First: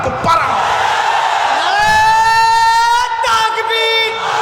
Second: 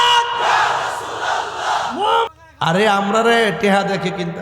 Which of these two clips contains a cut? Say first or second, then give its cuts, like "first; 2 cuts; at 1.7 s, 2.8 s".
second; 1 cut; at 2.3 s